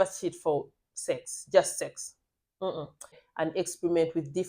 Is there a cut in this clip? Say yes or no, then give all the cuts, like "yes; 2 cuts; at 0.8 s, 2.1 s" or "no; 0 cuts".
yes; 1 cut; at 3.2 s